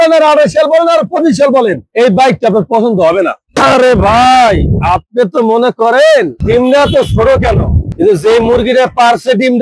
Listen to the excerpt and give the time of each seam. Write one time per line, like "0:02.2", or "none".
0:01.8
0:03.4